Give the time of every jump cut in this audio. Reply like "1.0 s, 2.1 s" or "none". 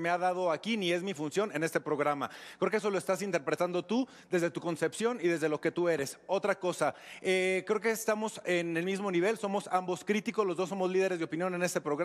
none